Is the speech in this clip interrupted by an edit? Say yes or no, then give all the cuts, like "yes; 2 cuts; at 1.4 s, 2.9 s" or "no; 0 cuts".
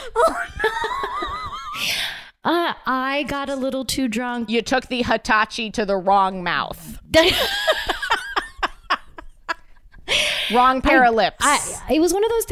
no; 0 cuts